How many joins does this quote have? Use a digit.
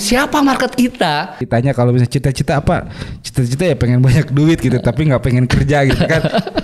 1